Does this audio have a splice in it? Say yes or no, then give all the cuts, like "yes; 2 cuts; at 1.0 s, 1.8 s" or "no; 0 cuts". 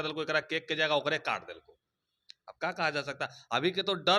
no; 0 cuts